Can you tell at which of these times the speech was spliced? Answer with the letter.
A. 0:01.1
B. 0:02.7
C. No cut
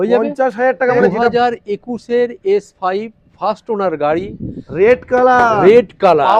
A